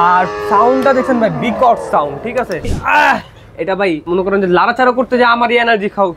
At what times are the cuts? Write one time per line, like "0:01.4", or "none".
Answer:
0:02.7
0:04.0